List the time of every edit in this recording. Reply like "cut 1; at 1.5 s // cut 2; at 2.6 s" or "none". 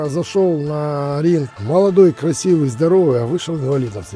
cut 1; at 1.5 s